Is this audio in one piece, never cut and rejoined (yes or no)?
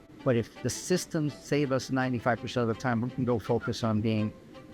yes